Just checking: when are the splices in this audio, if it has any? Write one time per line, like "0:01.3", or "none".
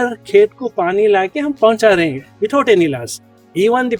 none